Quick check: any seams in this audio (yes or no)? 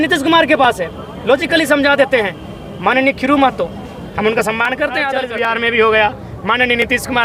yes